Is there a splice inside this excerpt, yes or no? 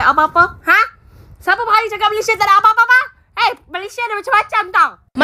no